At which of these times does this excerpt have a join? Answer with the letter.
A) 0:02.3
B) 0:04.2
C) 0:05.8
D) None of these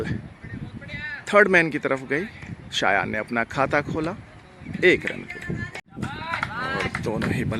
C